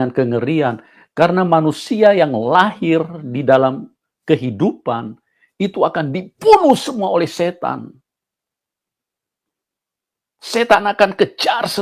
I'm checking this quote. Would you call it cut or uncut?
uncut